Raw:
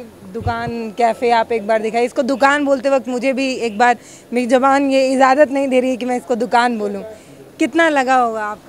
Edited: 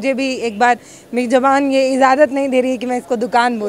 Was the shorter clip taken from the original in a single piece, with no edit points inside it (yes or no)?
yes